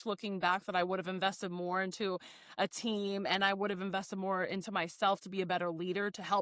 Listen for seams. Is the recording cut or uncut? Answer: uncut